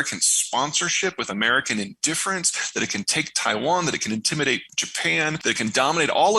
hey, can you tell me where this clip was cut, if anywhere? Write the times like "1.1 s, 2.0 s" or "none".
5.2 s